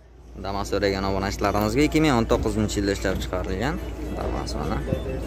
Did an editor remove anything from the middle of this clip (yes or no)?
no